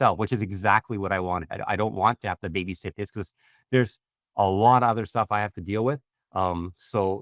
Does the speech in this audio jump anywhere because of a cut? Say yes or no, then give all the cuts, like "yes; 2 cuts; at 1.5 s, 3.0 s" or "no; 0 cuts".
no; 0 cuts